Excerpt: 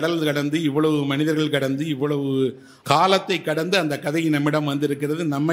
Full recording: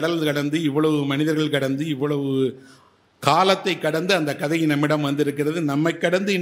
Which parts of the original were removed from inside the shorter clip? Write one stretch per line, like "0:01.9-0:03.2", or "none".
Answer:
0:02.7-0:03.0

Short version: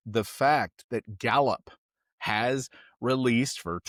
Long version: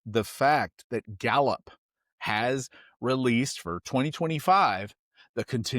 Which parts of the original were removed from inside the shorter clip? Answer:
none

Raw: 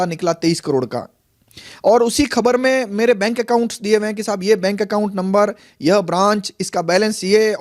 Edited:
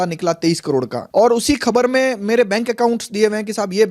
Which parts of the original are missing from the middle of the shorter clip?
0:01.0-0:01.7

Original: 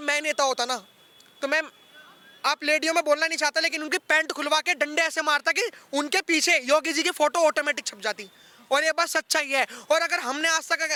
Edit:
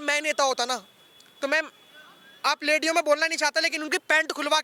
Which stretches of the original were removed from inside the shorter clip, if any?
none

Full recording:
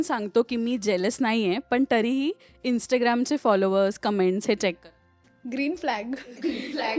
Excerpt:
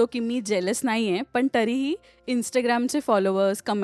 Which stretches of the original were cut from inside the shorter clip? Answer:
none

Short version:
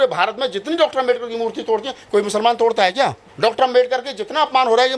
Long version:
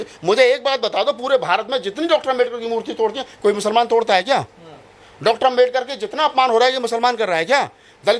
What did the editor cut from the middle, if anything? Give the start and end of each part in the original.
0:04.6-0:05.1

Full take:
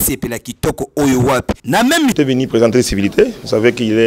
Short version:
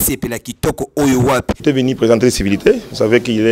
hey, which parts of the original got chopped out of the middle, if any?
0:01.6-0:02.1

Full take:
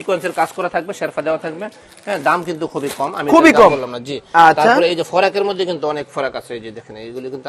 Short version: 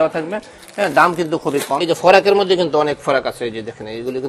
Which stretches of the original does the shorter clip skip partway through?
0:03.2-0:05.0

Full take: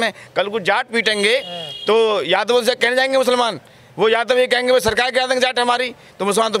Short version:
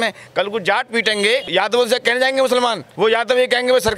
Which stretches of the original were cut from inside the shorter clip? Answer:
0:01.5-0:02.2
0:03.6-0:03.8

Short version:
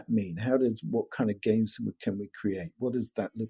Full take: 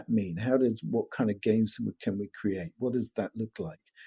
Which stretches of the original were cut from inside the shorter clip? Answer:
none

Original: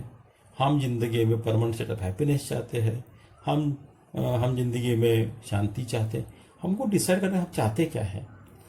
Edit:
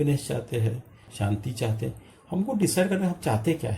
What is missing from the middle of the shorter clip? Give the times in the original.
0:03.3-0:05.4

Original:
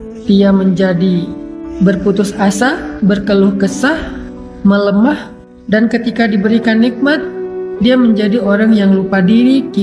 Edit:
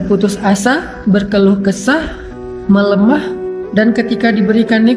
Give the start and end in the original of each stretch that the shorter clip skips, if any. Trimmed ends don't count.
none

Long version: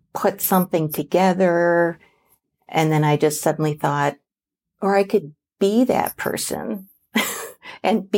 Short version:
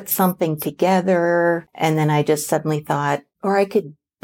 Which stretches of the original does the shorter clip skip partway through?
0:02.0-0:02.6
0:04.2-0:04.7

